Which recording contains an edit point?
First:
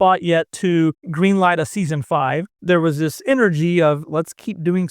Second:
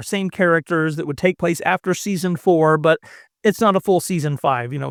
first; 3 cuts; at 1.0 s, 2.5 s, 4.0 s

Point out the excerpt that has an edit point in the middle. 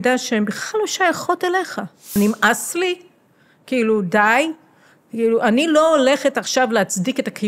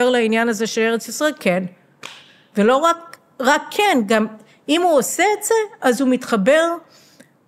first; 1 cut; at 2.1 s

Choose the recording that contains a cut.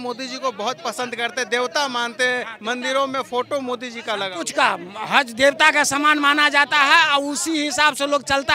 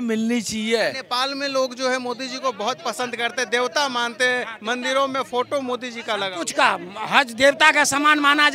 second; 1 cut; at 0.9 s

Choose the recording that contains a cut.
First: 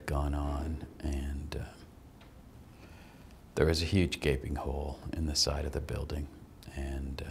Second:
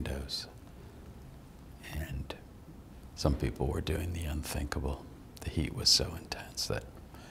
second; 1 cut; at 2.9 s

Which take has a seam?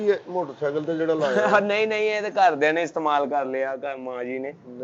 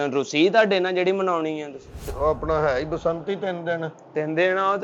second; 1 cut; at 2.0 s

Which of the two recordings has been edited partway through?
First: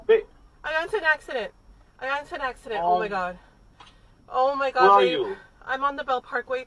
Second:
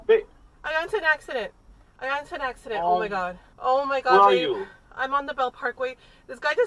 second; 1 cut; at 3.4 s

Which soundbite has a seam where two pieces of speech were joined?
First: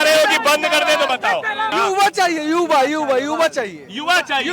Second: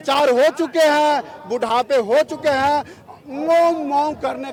first; 1 cut; at 1.7 s

